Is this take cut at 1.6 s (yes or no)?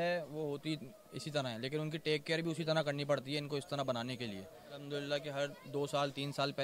no